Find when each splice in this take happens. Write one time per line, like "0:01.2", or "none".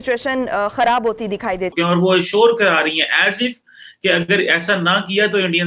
0:01.7